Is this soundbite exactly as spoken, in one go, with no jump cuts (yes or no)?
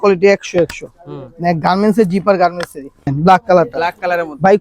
no